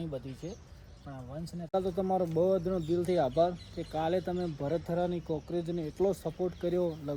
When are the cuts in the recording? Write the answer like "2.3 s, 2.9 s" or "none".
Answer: 1.7 s